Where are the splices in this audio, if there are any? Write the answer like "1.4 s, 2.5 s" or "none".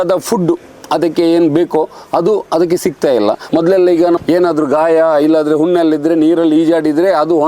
3.4 s, 4.2 s